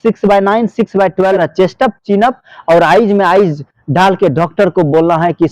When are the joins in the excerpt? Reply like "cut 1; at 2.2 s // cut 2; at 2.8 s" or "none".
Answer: cut 1; at 1.4 s